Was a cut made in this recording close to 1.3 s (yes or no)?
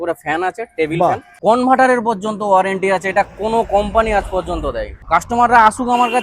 yes